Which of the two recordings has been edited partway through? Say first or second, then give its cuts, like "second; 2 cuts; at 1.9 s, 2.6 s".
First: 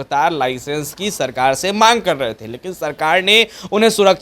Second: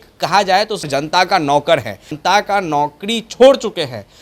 second; 2 cuts; at 0.9 s, 2.1 s